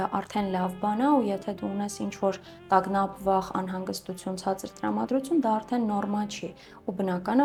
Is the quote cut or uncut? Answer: uncut